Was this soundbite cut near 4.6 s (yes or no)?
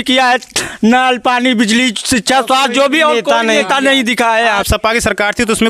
yes